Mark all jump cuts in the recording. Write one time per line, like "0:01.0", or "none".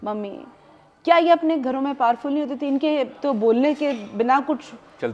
none